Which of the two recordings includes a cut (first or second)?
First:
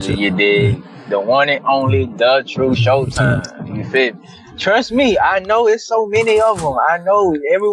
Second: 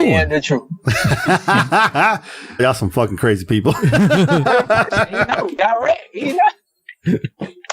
second